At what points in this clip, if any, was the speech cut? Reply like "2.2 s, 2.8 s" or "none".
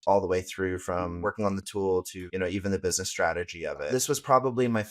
1.2 s, 2.2 s, 3.8 s